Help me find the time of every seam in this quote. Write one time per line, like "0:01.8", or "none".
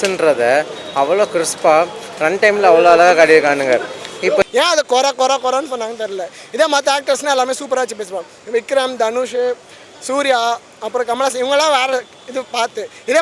0:04.4